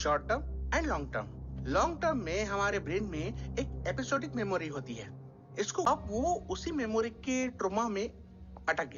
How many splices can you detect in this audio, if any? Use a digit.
1